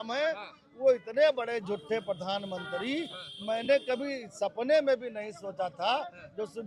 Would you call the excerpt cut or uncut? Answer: uncut